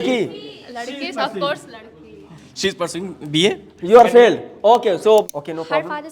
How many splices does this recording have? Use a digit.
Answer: 1